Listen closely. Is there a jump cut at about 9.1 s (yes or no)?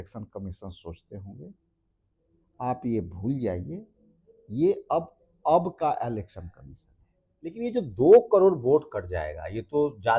no